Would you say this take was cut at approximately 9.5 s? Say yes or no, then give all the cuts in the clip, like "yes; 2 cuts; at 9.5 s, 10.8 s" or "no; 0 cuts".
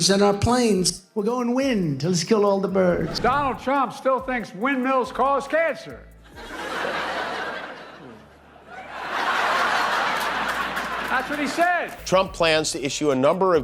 no; 2 cuts; at 3.1 s, 11.9 s